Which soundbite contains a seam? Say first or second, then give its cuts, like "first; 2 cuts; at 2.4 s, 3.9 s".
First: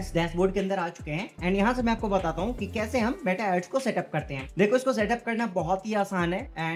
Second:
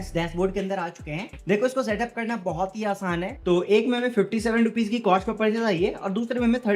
second; 2 cuts; at 1.3 s, 3.4 s